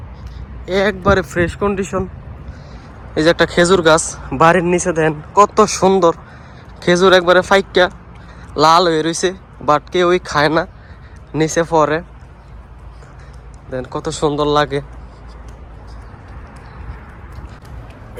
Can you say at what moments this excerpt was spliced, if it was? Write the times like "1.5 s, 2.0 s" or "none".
none